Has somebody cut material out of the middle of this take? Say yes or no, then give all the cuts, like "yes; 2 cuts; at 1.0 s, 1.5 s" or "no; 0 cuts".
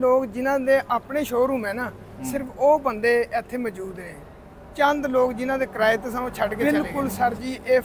yes; 1 cut; at 6.6 s